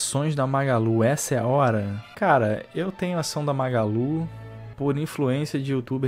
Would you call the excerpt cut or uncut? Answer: uncut